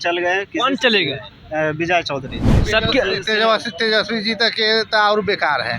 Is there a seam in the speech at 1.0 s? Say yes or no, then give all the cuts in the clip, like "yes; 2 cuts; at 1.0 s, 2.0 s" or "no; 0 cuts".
no; 1 cut; at 2.4 s